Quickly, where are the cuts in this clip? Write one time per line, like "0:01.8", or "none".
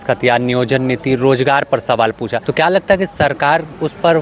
0:02.4

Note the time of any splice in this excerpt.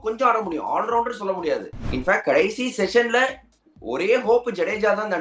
0:01.7

